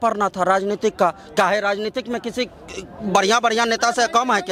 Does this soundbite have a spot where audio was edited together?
no; 0 cuts

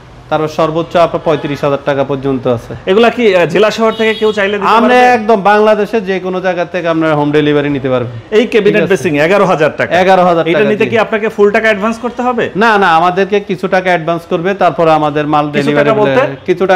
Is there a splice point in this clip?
no; 0 cuts

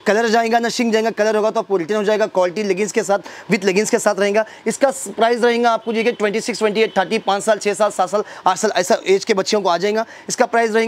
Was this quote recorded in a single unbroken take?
yes; 0 cuts

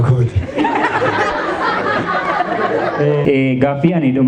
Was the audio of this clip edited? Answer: yes; 1 cut; at 3.2 s

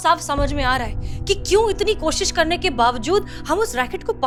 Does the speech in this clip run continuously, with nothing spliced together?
yes; 0 cuts

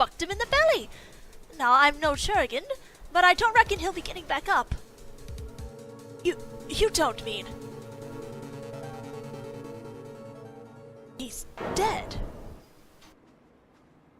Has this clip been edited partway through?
no; 0 cuts

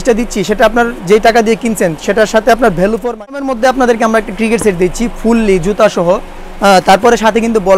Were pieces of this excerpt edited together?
yes; 1 cut; at 3.4 s

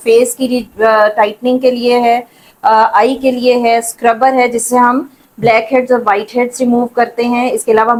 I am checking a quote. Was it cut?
no; 0 cuts

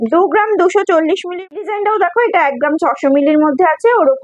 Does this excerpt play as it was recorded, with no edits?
no; 1 cut; at 1.2 s

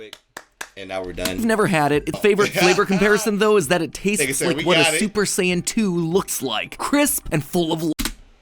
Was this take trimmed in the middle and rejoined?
yes; 1 cut; at 2.2 s

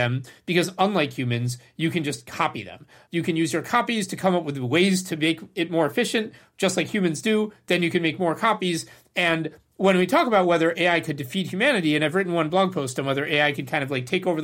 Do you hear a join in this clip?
yes; 1 cut; at 3.0 s

